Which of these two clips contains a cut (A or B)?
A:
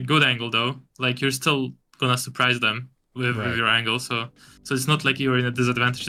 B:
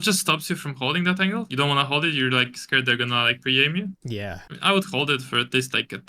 B